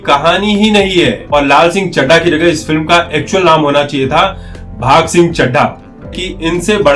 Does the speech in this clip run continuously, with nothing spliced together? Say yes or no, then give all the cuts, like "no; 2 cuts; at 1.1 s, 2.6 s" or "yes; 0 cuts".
no; 2 cuts; at 1.2 s, 6.2 s